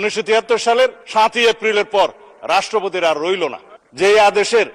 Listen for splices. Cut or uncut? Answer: cut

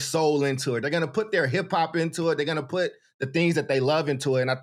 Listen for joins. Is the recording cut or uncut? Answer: uncut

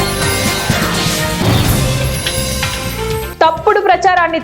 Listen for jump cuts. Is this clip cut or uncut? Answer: cut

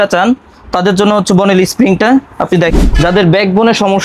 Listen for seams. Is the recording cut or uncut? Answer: cut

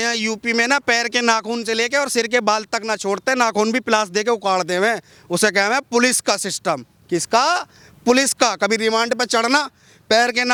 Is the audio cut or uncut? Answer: uncut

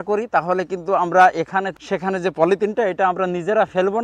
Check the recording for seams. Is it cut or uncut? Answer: cut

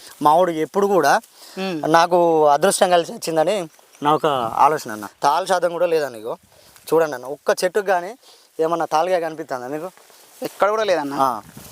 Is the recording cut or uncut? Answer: cut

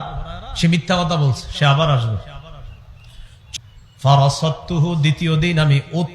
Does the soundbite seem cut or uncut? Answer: cut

